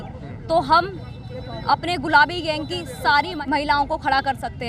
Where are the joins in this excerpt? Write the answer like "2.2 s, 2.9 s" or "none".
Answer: 3.3 s